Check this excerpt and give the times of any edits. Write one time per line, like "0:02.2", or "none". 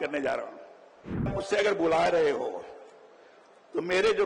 0:01.3